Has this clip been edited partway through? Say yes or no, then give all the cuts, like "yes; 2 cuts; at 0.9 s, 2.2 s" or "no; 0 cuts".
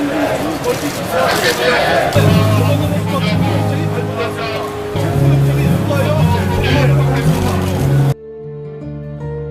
no; 0 cuts